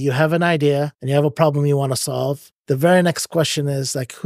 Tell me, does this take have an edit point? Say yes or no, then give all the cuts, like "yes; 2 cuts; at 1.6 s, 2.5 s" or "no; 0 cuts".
yes; 2 cuts; at 1.0 s, 2.5 s